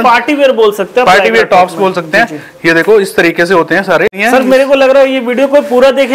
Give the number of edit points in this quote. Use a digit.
1